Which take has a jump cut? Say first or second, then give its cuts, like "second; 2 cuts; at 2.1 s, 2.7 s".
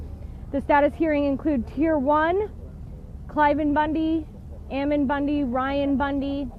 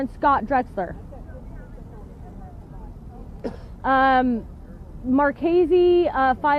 second; 1 cut; at 2.3 s